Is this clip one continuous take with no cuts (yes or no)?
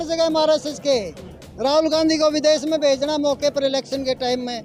yes